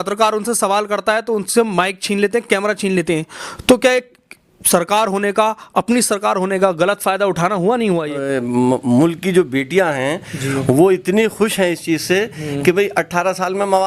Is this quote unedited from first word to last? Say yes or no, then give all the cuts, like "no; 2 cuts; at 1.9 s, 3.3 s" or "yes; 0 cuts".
no; 1 cut; at 8.2 s